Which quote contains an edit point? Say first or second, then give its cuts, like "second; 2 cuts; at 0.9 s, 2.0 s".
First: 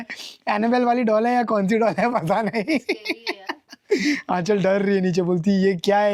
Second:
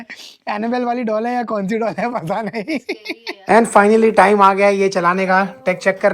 second; 1 cut; at 3.3 s